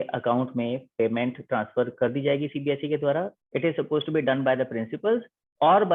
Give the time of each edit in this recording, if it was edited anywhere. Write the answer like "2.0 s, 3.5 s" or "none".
3.1 s